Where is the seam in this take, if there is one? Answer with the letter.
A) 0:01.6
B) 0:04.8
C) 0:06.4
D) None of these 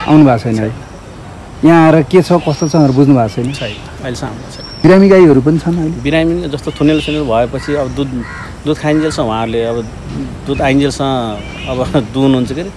B